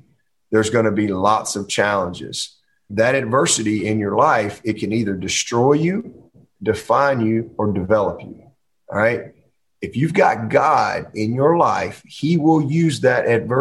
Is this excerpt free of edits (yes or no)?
no